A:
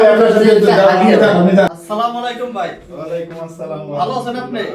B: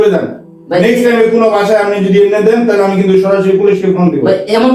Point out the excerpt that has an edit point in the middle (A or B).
A